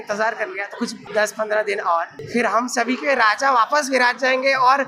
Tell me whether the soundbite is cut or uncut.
cut